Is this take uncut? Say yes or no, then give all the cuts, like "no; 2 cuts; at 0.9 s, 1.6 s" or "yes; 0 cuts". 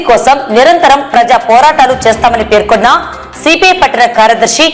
yes; 0 cuts